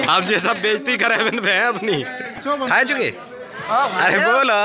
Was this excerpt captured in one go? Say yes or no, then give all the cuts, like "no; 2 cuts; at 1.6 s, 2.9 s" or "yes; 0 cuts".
no; 1 cut; at 2.4 s